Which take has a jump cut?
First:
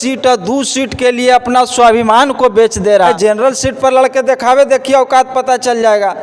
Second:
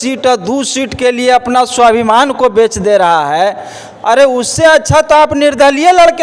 first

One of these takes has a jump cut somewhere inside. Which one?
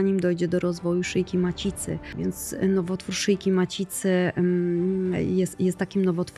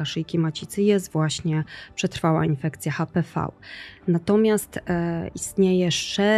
first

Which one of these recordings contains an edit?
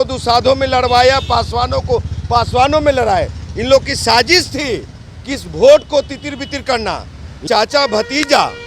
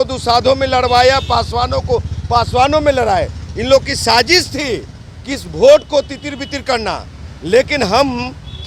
first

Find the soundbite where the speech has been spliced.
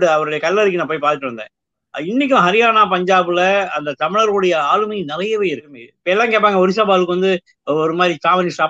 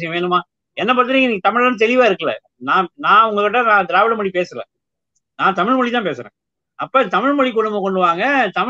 first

